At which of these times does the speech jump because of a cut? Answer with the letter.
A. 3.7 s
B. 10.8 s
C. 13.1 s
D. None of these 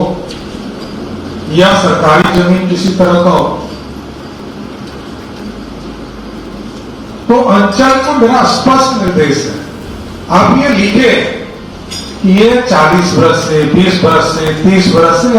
D